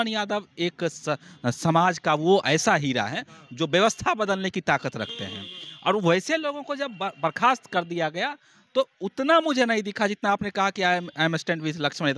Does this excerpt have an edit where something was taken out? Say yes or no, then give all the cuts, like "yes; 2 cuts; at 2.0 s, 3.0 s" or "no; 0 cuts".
no; 0 cuts